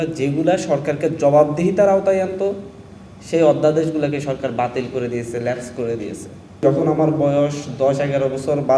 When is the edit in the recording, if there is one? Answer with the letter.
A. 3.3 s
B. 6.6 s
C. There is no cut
B